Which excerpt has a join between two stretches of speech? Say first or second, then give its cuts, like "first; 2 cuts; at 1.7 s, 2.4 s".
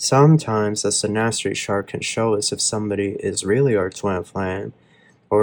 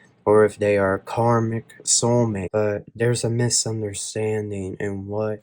second; 1 cut; at 2.4 s